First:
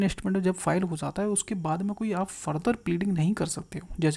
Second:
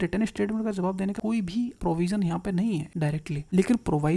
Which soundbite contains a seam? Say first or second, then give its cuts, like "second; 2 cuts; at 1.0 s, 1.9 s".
second; 2 cuts; at 1.3 s, 3.0 s